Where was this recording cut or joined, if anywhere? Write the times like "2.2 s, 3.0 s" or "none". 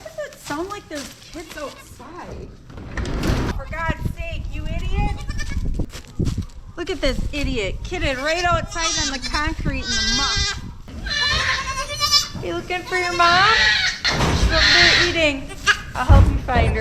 3.5 s, 5.9 s, 10.9 s, 14.0 s, 15.8 s